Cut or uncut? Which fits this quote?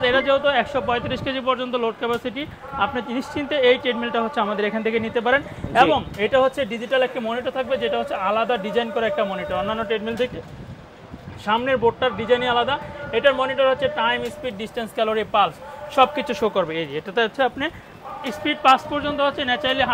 uncut